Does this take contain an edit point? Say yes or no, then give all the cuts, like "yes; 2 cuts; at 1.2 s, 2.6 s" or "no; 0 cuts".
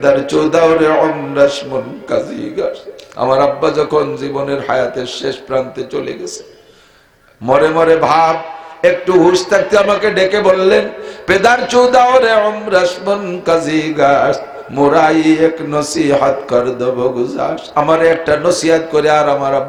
no; 0 cuts